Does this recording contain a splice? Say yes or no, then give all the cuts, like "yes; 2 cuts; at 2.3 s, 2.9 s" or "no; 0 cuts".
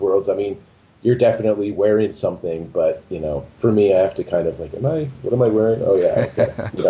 no; 0 cuts